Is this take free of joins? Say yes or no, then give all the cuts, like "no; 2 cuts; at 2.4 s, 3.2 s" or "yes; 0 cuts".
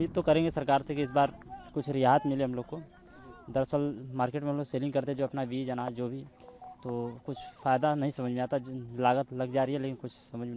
yes; 0 cuts